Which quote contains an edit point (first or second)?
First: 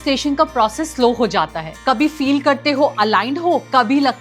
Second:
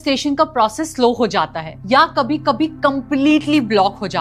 first